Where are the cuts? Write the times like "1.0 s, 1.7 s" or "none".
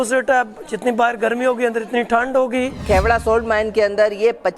2.8 s